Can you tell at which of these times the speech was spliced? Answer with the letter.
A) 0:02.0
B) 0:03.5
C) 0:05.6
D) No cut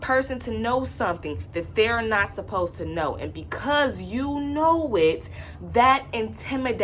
D